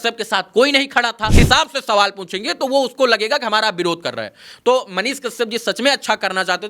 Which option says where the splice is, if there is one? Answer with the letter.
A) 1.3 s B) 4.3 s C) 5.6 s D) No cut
A